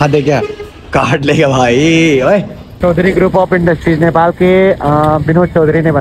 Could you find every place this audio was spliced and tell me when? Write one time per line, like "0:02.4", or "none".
0:02.6